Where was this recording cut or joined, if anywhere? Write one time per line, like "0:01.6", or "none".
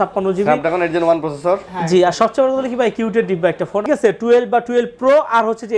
0:03.8